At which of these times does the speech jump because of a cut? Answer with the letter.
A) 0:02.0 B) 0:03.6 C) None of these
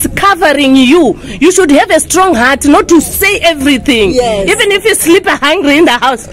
C